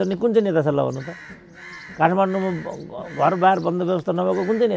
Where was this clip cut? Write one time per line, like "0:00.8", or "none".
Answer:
none